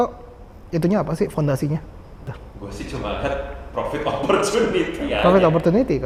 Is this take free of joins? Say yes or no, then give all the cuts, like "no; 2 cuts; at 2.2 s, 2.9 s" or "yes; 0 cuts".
yes; 0 cuts